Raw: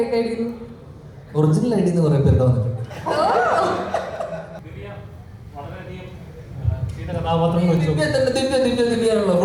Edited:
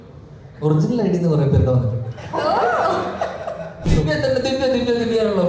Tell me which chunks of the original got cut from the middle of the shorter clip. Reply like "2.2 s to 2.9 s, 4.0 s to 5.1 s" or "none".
4.6 s to 7.8 s